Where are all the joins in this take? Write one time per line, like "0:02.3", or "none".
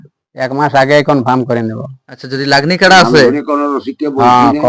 none